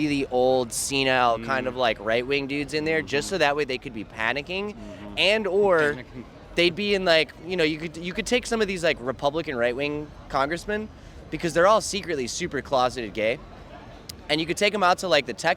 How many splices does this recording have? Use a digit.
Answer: 0